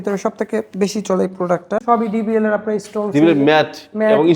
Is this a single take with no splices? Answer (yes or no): no